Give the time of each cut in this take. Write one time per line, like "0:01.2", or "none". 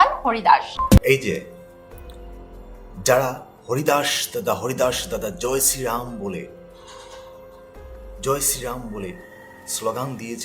0:01.0